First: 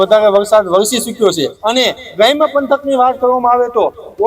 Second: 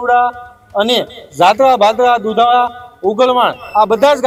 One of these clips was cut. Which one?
first; 1 cut; at 1.5 s

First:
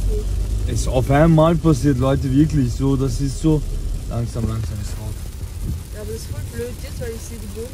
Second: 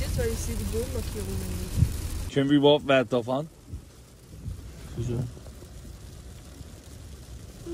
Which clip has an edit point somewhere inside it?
second; 1 cut; at 2.2 s

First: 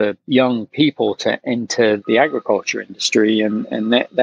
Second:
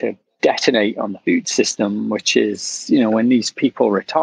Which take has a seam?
first; 1 cut; at 2.0 s

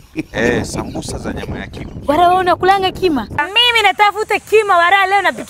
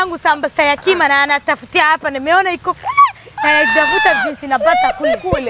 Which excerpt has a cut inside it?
first; 1 cut; at 3.5 s

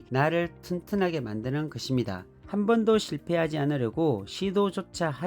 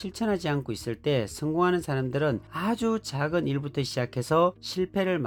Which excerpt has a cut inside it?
first; 1 cut; at 2.4 s

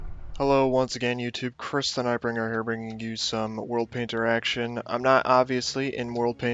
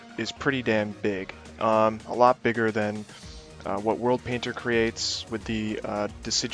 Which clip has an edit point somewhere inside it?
second; 1 cut; at 3.8 s

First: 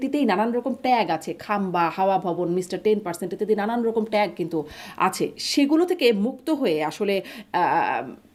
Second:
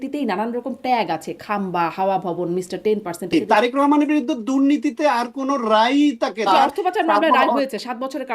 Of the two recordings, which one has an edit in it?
second; 2 cuts; at 3.3 s, 6.5 s

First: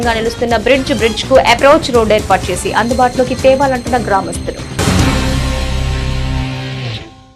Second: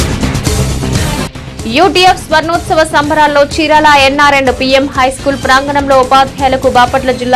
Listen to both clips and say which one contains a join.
second; 1 cut; at 1.1 s

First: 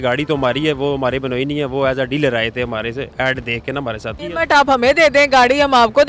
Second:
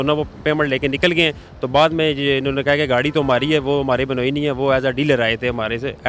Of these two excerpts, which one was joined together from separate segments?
first; 1 cut; at 4.2 s

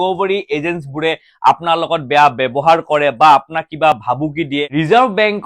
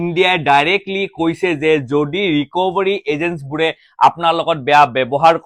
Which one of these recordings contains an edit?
first; 1 cut; at 4.6 s

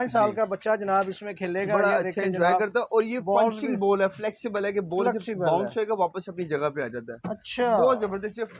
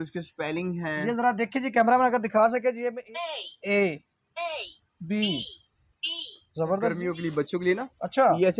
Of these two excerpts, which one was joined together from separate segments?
second; 2 cuts; at 3.0 s, 7.0 s

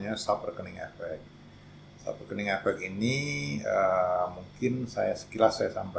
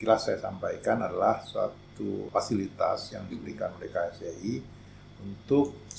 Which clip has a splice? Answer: second; 1 cut; at 2.2 s

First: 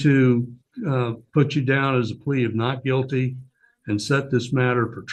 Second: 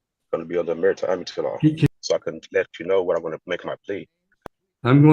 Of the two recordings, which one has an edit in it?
second; 2 cuts; at 1.9 s, 4.2 s

